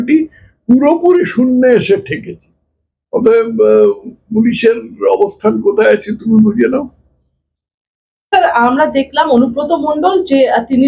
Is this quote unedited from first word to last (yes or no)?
yes